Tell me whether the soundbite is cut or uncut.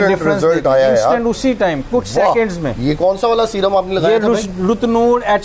uncut